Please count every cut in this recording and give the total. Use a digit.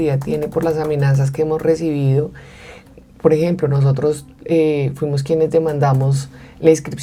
0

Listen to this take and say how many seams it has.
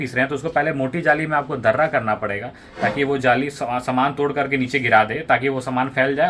0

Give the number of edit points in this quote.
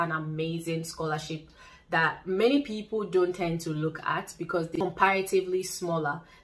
1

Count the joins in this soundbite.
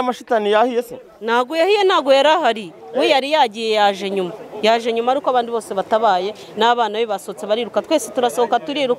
0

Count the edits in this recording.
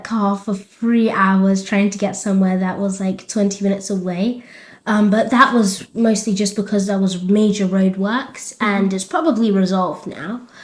0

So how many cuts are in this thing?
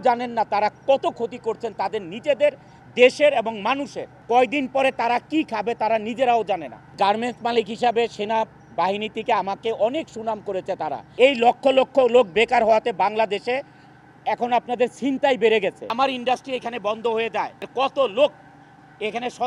5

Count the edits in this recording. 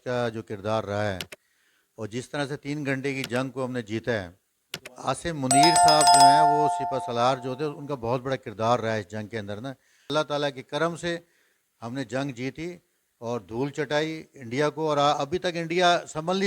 3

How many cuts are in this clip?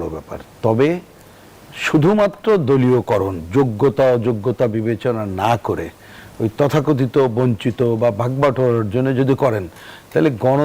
0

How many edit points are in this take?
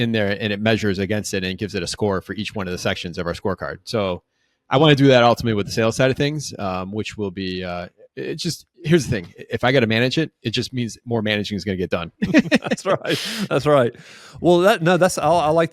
0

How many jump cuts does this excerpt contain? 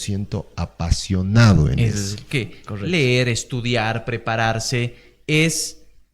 1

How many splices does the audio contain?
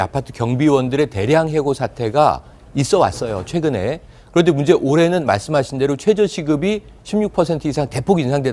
1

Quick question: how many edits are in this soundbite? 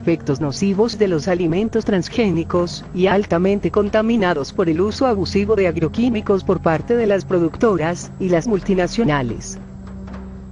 1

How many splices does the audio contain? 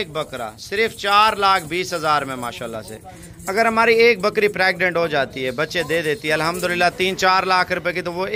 0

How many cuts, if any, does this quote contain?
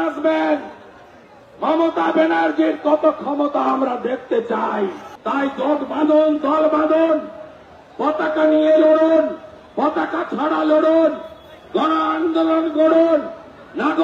1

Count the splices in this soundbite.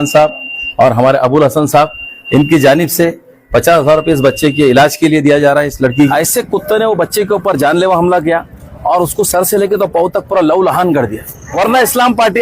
2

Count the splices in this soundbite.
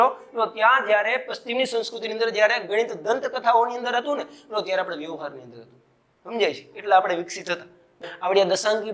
1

